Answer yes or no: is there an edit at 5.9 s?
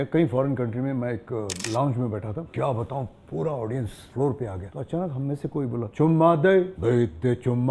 yes